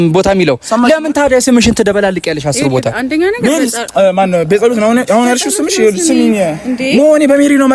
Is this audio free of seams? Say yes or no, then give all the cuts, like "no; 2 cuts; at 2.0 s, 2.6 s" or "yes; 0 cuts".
yes; 0 cuts